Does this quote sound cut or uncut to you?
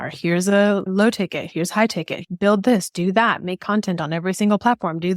cut